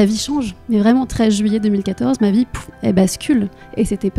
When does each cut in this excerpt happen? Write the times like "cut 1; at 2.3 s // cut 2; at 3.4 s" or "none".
none